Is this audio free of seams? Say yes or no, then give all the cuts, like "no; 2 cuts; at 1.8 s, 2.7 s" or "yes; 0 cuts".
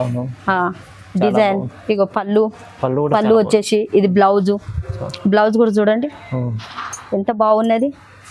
no; 1 cut; at 6.5 s